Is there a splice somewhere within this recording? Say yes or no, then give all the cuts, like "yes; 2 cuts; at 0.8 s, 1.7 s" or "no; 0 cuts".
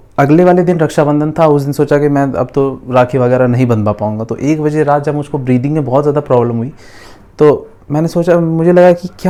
no; 0 cuts